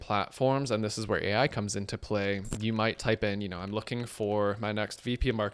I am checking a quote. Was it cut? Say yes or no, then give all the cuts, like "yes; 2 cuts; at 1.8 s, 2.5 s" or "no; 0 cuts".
yes; 1 cut; at 2.5 s